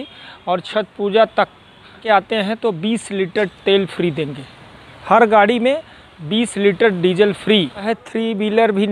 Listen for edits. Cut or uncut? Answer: cut